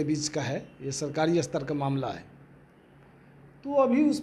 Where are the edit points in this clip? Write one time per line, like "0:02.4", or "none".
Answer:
none